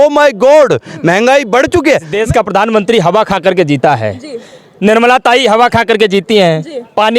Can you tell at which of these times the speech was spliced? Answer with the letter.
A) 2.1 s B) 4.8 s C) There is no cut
A